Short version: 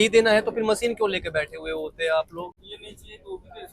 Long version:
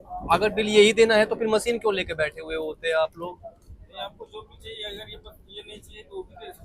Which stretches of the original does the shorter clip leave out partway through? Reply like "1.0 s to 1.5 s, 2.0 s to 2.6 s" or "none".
3.4 s to 5.4 s